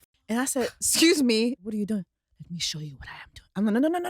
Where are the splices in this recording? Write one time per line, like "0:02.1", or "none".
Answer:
0:01.6